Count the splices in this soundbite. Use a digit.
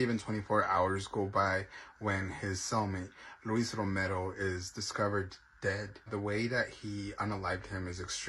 1